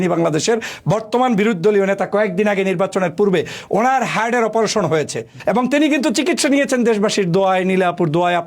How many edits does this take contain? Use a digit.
1